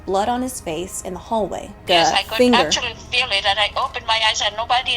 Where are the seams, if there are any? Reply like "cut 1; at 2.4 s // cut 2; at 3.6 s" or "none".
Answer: cut 1; at 1.8 s